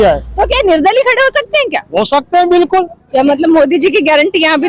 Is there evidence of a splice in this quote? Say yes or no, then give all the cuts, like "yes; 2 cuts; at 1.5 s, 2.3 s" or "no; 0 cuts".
yes; 1 cut; at 3.0 s